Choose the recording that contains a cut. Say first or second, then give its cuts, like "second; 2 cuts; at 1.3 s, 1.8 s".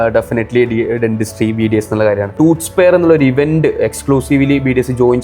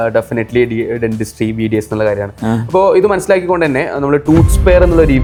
first; 1 cut; at 2.3 s